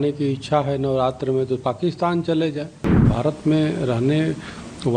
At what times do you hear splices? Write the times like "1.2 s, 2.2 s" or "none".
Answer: 3.1 s